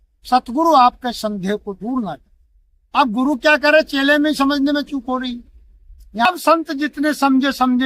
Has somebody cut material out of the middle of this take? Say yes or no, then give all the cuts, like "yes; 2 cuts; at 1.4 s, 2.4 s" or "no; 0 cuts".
yes; 1 cut; at 6.2 s